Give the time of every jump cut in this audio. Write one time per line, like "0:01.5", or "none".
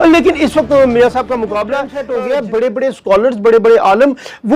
0:02.0